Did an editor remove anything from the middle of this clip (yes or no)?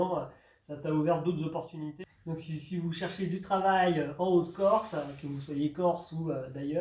yes